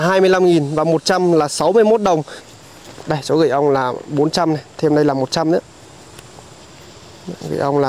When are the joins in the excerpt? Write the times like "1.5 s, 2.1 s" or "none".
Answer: 2.5 s